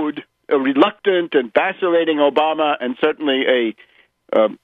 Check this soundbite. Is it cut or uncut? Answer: uncut